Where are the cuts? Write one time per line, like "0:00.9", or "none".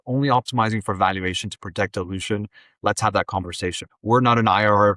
0:03.9